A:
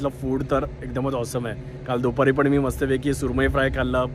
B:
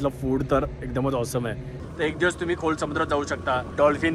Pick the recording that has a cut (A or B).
B